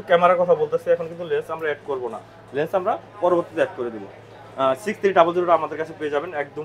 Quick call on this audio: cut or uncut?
uncut